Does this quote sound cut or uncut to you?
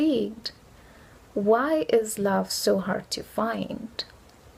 uncut